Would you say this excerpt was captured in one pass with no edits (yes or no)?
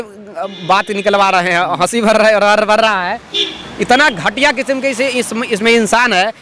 yes